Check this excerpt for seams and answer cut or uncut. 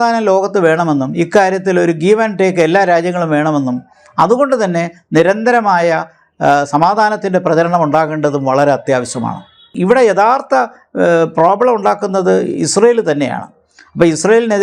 cut